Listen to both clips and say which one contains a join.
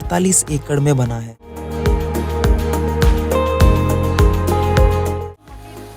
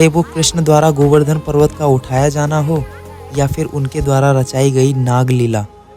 first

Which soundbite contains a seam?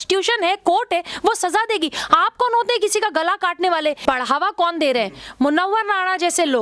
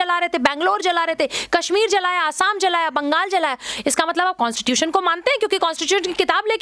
first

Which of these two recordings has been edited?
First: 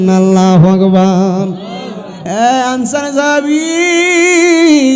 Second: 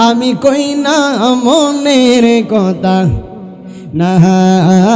first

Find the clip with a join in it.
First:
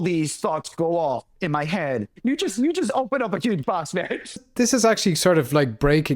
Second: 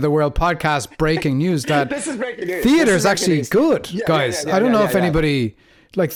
first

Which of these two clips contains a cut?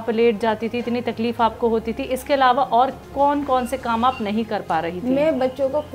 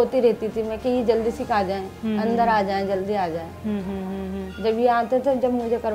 first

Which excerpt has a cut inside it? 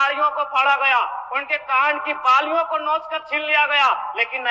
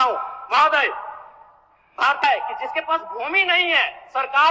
second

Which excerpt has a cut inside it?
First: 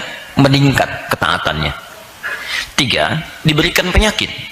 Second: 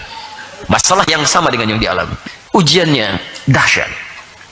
second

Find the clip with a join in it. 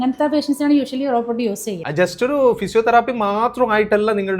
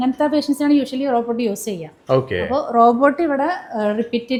first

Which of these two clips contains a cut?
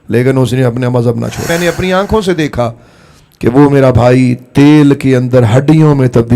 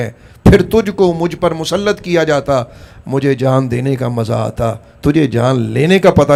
first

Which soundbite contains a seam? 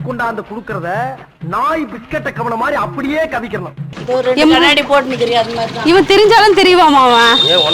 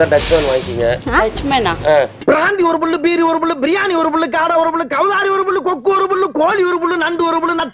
first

